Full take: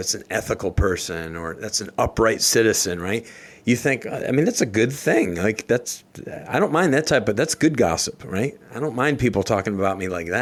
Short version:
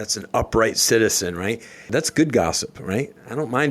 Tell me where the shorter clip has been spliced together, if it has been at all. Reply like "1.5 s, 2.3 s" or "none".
1.9 s